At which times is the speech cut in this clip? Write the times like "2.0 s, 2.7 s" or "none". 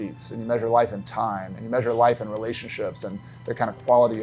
none